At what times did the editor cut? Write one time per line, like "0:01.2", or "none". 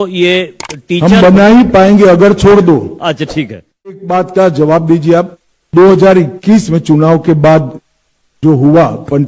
0:04.0